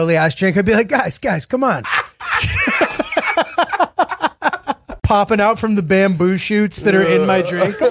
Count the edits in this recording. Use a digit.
1